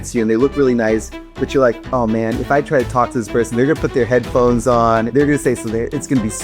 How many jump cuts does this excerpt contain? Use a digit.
1